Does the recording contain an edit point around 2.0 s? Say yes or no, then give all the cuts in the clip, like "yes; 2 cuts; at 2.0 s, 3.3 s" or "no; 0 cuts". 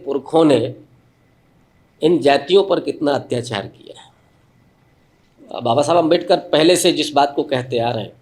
no; 1 cut; at 5.5 s